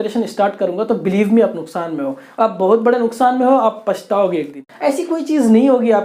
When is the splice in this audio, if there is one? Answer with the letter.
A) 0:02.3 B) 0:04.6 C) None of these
B